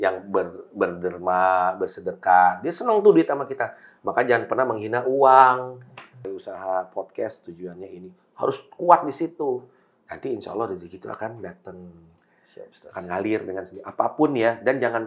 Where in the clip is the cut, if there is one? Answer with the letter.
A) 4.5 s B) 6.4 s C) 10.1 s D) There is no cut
B